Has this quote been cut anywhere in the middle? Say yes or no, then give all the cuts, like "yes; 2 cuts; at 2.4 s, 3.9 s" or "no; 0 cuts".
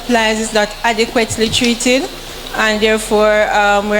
yes; 1 cut; at 2.7 s